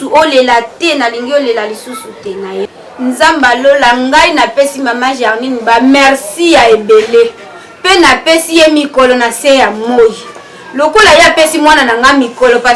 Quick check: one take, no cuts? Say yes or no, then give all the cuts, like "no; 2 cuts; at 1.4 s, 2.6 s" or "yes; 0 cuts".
no; 1 cut; at 2.6 s